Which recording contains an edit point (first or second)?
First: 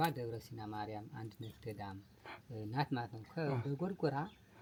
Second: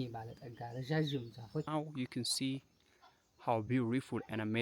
second